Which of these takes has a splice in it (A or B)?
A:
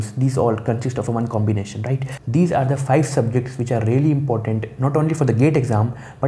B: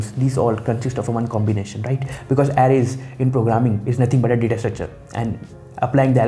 A